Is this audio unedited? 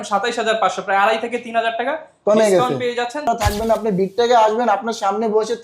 no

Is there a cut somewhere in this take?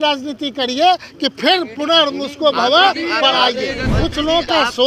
yes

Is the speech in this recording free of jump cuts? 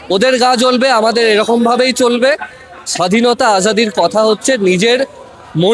yes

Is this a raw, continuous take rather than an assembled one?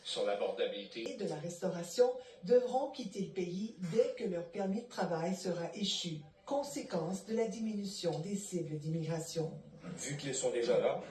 no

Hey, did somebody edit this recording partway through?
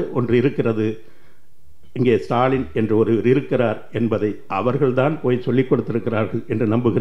no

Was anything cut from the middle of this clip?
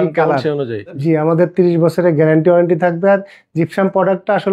yes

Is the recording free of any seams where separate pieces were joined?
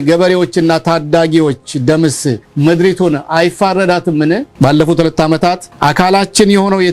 no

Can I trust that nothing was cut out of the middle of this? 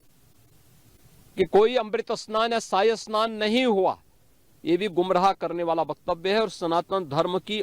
yes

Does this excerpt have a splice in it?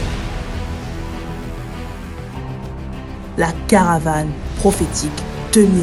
yes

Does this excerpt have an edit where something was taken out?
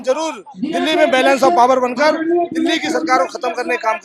no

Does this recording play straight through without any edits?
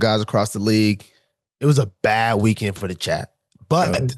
yes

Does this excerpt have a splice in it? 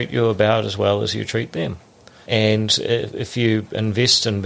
yes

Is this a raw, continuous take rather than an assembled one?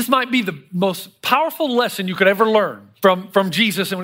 no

